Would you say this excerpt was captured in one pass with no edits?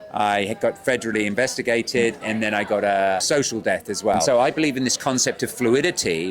no; 3 cuts; at 2.2 s, 3.2 s, 4.2 s

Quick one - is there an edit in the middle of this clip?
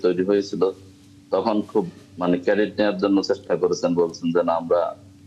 no; 0 cuts

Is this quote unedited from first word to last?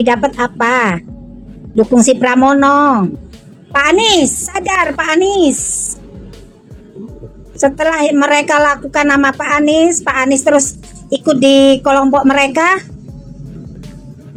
yes; 0 cuts

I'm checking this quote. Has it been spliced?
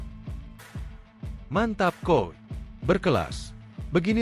yes; 1 cut; at 1.4 s

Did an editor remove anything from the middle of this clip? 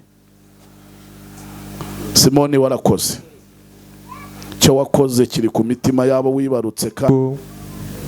yes; 1 cut; at 7.1 s

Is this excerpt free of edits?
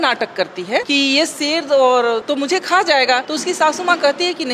no; 3 cuts; at 0.9 s, 2.2 s, 3.3 s

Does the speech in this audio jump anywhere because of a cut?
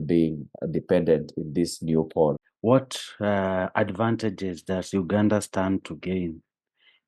yes; 1 cut; at 2.4 s

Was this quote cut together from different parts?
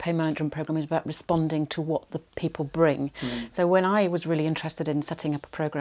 no; 0 cuts

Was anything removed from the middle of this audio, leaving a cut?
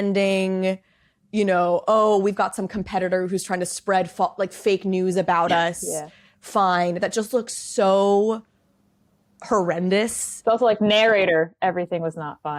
no; 0 cuts

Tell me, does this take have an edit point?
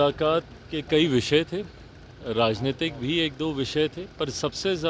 no; 0 cuts

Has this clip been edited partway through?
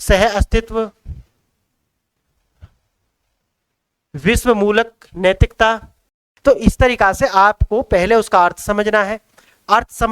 yes; 1 cut; at 6.3 s

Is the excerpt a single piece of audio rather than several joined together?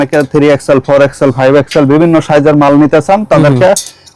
yes; 0 cuts

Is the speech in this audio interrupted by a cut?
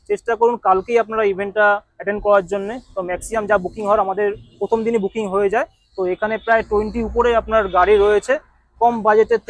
no; 0 cuts

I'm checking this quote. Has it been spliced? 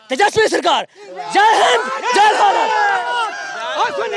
no; 0 cuts

